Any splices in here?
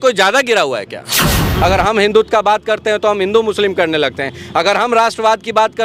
yes; 1 cut; at 1.3 s

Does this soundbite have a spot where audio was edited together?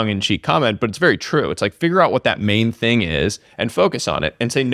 no; 0 cuts

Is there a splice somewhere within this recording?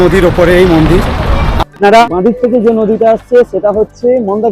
yes; 1 cut; at 2.1 s

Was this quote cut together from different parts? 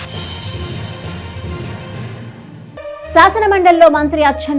yes; 1 cut; at 2.6 s

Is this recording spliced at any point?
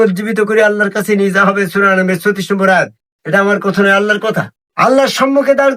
yes; 1 cut; at 4.6 s

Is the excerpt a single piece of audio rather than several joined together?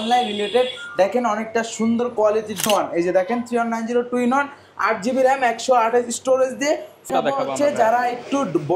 no; 2 cuts; at 2.7 s, 7.1 s

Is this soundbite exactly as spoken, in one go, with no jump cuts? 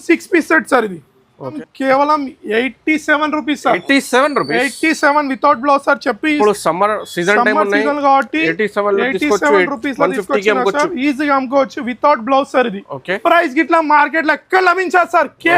no; 2 cuts; at 1.6 s, 13.2 s

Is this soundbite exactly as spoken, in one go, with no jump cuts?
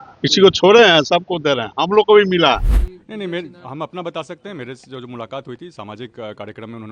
no; 1 cut; at 2.7 s

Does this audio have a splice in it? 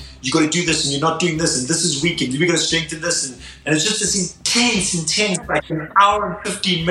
yes; 1 cut; at 3.5 s

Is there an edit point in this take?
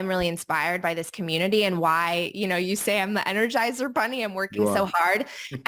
no; 0 cuts

